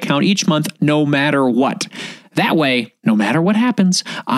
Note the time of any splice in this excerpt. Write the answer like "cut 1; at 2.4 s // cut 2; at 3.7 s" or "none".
cut 1; at 2.9 s